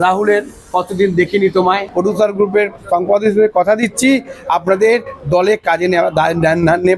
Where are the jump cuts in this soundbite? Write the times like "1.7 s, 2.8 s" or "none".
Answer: 1.9 s